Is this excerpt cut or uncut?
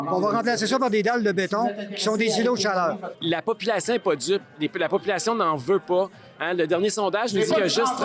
cut